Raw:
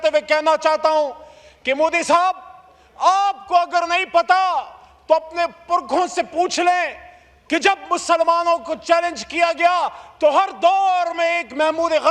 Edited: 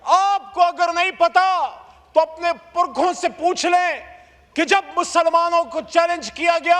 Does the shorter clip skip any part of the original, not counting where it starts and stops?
no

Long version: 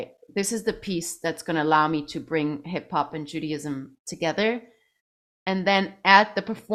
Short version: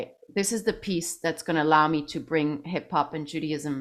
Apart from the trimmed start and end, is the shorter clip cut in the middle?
no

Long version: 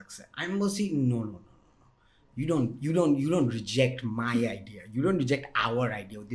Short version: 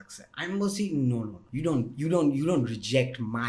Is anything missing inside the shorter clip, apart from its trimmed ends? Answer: yes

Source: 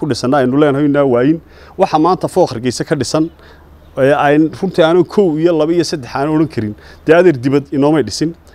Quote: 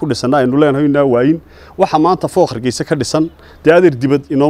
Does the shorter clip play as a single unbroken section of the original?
no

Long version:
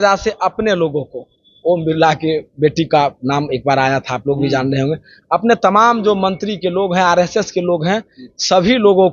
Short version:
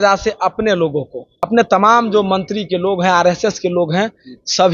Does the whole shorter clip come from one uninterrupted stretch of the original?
no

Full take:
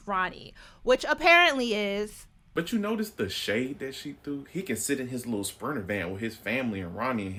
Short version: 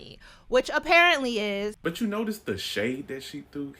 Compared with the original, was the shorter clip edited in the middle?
yes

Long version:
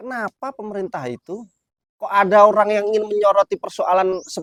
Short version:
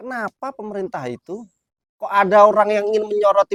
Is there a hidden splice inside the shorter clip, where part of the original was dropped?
no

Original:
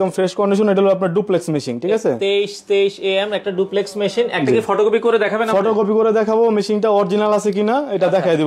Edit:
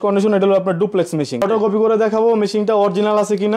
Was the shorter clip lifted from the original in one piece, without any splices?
no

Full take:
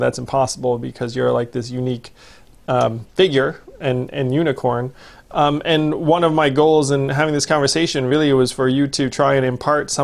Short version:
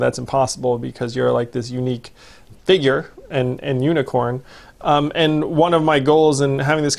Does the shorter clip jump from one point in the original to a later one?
yes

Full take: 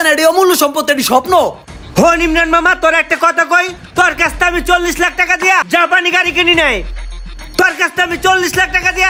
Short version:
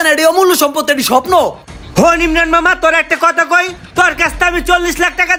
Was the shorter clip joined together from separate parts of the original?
no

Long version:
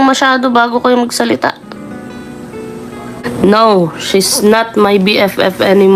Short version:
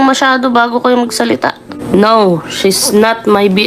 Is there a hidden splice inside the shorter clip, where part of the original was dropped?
yes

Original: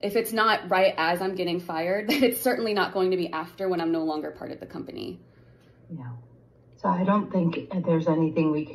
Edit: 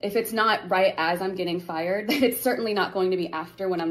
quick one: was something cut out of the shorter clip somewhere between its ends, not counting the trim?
no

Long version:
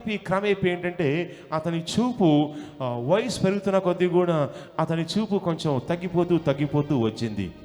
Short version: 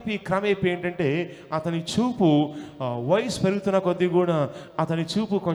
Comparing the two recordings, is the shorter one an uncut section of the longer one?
yes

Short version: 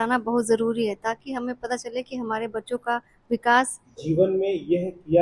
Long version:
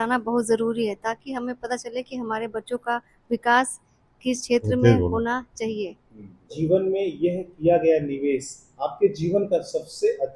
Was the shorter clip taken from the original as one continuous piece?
no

